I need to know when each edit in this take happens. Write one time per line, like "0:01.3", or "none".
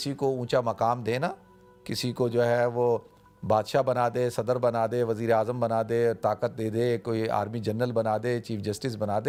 none